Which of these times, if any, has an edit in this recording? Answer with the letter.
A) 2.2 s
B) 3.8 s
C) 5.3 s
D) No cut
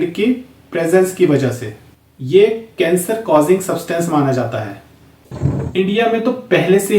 C